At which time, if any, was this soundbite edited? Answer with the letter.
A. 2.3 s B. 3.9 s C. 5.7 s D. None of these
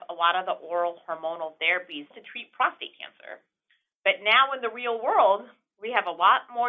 D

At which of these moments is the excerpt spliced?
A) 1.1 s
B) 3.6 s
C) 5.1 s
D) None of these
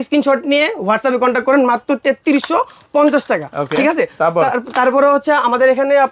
D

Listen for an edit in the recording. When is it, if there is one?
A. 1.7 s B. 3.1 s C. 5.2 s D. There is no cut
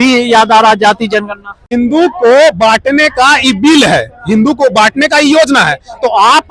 A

